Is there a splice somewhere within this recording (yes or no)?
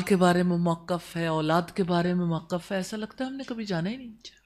no